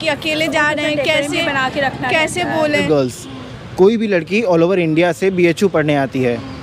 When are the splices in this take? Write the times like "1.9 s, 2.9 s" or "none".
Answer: 2.8 s